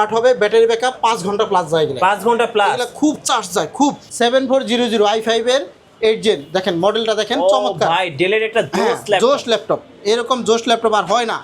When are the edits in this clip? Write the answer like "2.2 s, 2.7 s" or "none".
4.0 s

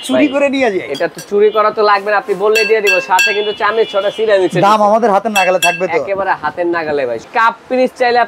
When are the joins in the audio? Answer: 7.3 s

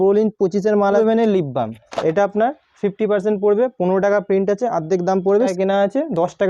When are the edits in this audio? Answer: 1.0 s, 5.5 s

